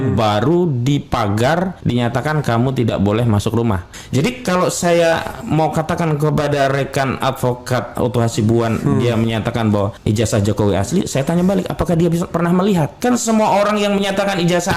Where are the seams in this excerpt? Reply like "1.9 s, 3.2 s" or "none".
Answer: 1.8 s, 3.9 s, 10.0 s, 12.9 s

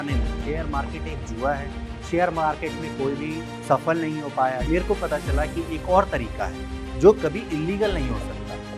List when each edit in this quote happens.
none

